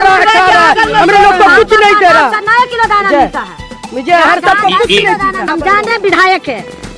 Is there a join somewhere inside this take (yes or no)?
yes